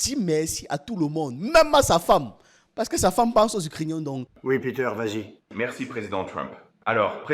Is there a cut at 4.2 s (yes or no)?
yes